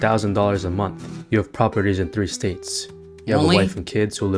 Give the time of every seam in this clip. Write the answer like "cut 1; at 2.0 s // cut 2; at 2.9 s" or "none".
none